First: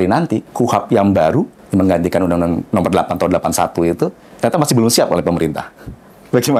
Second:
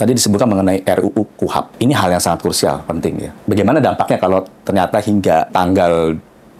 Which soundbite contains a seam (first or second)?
second